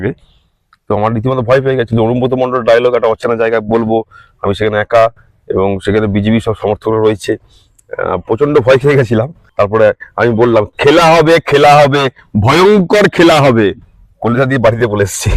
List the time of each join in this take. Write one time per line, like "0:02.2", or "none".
0:09.4